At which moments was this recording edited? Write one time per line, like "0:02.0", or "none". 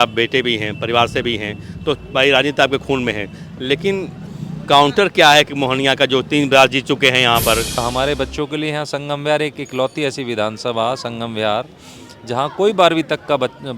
0:07.7